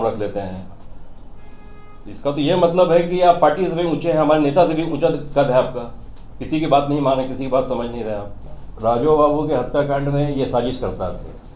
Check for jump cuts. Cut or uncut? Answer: cut